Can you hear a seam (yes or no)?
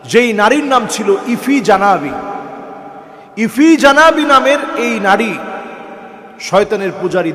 no